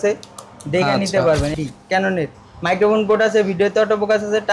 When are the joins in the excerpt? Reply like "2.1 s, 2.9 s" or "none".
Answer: 1.5 s